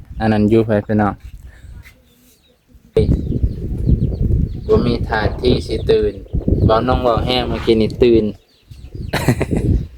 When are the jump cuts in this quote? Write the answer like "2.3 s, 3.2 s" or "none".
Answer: 3.0 s